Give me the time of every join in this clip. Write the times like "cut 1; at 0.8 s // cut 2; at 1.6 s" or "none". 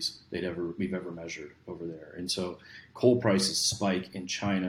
none